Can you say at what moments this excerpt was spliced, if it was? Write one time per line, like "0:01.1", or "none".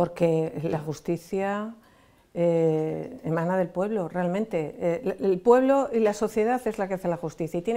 none